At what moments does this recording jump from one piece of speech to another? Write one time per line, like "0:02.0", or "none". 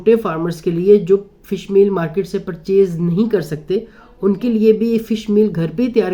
none